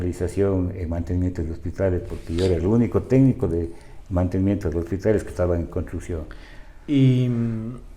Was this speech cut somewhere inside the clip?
no; 0 cuts

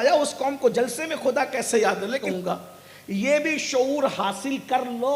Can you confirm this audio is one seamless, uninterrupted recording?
no; 1 cut; at 2.2 s

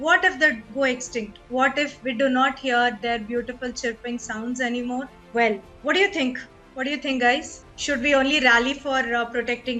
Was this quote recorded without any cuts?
yes; 0 cuts

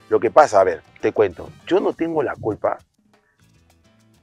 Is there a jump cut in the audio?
no; 0 cuts

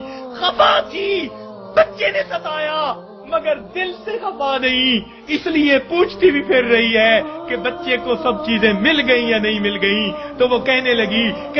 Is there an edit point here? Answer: no; 0 cuts

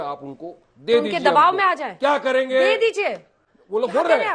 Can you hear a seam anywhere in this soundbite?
no; 0 cuts

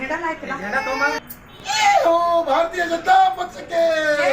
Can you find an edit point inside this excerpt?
yes; 1 cut; at 3.4 s

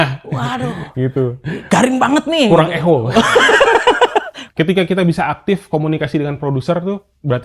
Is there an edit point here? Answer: yes; 1 cut; at 4.4 s

